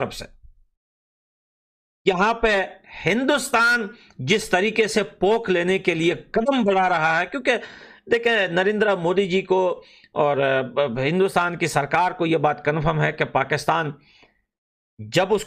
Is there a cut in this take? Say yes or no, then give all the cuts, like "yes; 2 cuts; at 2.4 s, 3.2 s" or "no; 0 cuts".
no; 0 cuts